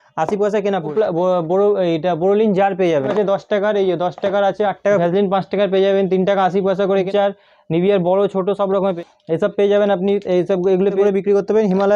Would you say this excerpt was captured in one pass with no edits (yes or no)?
no